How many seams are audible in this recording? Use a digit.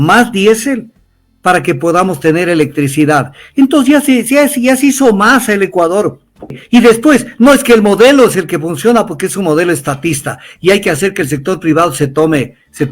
1